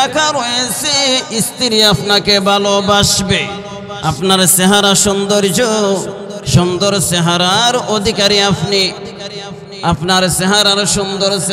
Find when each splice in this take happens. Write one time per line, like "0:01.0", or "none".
none